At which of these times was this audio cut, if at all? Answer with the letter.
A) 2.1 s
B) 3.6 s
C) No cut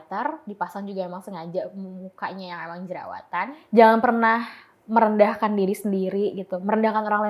B